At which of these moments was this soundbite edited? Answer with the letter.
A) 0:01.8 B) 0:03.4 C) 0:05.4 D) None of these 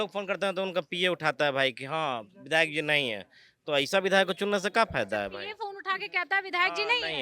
D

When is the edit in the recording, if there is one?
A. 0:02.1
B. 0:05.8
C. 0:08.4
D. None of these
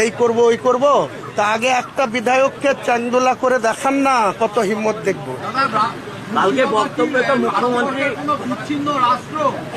D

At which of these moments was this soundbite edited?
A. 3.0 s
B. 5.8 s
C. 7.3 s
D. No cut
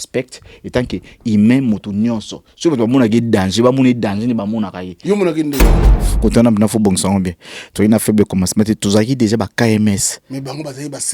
B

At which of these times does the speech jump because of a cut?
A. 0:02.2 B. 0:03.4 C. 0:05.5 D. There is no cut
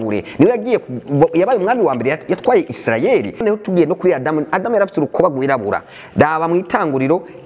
B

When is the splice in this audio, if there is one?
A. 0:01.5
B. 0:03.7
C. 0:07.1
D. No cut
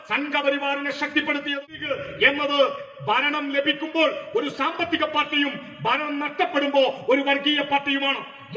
A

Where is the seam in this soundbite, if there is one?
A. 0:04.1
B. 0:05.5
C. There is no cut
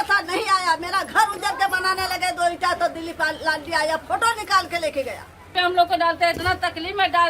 B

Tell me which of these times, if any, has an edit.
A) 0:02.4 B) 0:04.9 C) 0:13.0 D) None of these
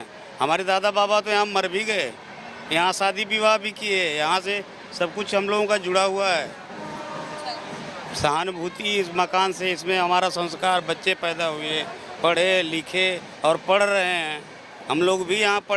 D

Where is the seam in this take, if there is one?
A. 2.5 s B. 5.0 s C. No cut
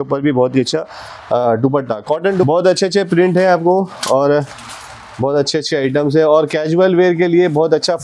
A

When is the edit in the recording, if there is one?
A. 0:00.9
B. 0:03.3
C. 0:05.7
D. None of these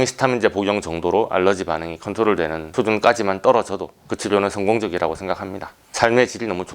C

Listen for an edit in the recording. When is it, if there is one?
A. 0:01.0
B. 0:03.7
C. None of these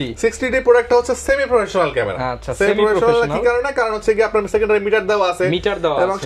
C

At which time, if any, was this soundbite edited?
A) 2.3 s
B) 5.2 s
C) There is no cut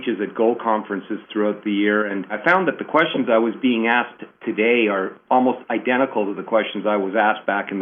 A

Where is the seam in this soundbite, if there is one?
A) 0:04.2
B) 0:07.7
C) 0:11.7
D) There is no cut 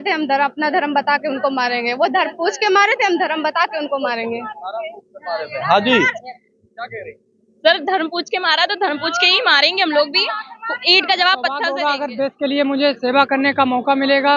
C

